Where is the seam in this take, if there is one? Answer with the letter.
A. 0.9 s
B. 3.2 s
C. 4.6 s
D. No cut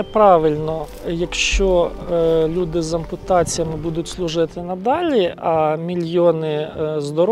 A